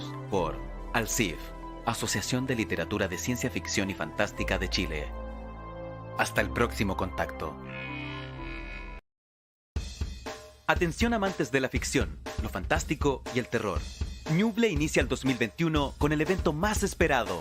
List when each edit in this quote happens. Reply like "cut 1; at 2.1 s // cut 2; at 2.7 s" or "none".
cut 1; at 9.2 s